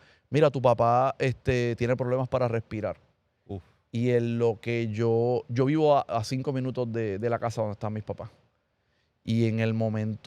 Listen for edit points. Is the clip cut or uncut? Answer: uncut